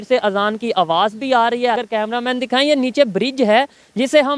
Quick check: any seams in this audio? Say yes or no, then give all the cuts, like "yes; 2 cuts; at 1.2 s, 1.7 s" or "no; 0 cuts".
yes; 1 cut; at 1.8 s